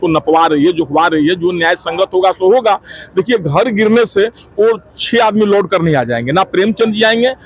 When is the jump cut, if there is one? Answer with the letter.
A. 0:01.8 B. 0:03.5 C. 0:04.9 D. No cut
D